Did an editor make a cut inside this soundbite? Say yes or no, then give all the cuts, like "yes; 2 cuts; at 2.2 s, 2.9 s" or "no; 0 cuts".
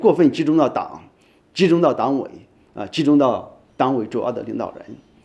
no; 0 cuts